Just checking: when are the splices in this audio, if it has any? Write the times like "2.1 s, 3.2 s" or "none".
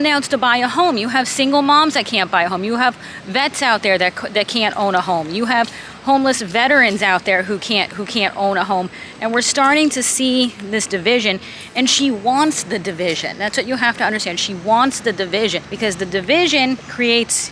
none